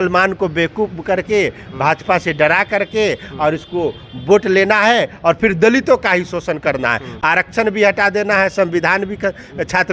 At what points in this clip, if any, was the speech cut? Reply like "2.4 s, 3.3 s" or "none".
none